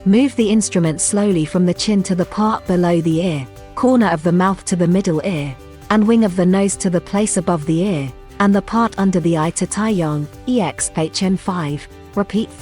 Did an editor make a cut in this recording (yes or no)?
no